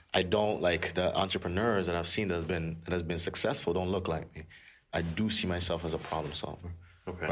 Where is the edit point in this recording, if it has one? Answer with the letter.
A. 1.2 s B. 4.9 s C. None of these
B